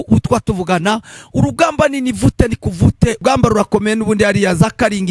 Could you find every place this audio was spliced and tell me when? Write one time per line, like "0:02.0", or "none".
0:03.2